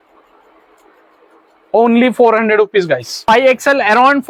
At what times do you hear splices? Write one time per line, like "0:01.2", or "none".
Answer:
0:03.1